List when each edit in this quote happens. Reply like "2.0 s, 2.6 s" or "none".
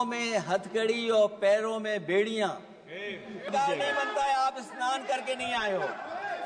3.4 s

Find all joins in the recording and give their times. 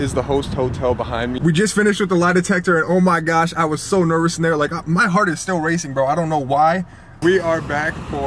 1.4 s, 7.1 s

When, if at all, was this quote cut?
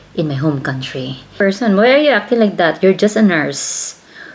1.3 s

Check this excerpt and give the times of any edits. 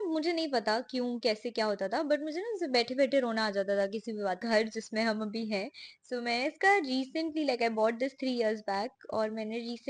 4.4 s

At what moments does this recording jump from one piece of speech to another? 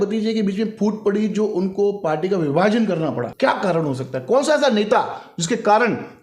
3.3 s

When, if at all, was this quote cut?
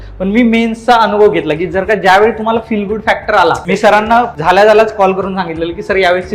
3.6 s, 4.3 s

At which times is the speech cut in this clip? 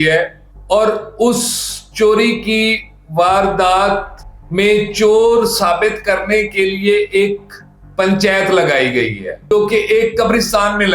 9.4 s

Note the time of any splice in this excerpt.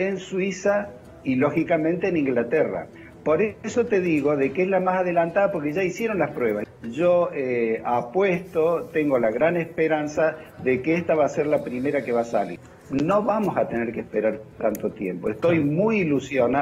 6.7 s, 12.6 s

